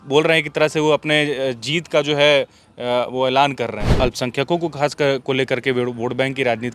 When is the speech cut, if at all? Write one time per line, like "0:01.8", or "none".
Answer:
0:03.8